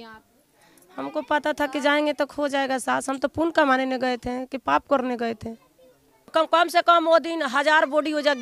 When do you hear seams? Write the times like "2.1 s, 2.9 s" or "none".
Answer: 6.3 s